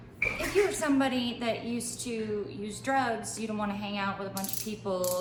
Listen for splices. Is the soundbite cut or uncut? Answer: uncut